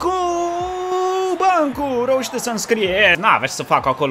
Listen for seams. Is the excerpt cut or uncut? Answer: cut